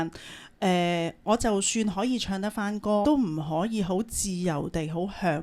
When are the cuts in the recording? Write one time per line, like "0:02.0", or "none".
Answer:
0:03.0